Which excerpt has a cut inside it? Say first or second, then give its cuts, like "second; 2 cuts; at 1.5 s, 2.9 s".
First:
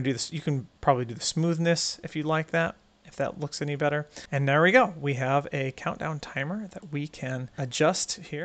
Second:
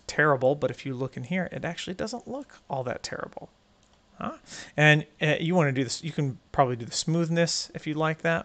first; 2 cuts; at 4.2 s, 7.5 s